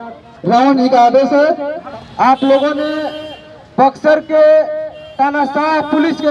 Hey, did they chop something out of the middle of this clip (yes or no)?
yes